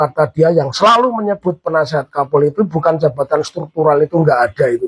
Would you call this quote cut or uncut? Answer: uncut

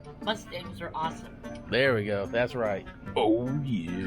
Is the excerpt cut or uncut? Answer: cut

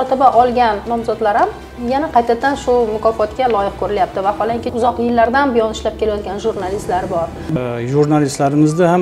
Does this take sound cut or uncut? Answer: cut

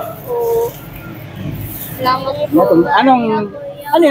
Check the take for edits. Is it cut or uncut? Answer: uncut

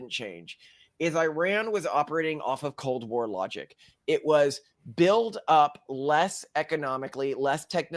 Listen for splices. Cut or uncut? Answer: uncut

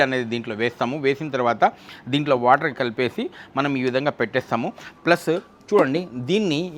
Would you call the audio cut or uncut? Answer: uncut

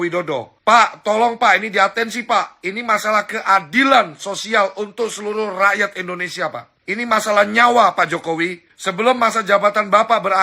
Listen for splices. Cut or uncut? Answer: uncut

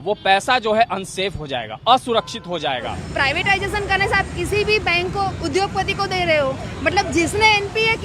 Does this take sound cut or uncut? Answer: cut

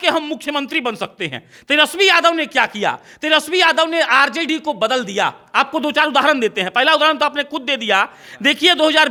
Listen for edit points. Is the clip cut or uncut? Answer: uncut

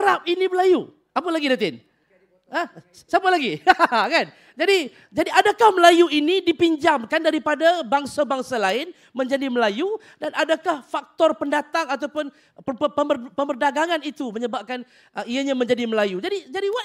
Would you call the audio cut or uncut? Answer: uncut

